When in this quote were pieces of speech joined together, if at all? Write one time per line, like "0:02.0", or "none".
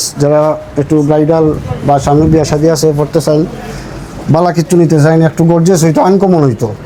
none

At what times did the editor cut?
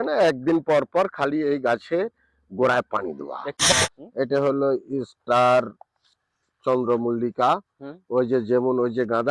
0:03.6

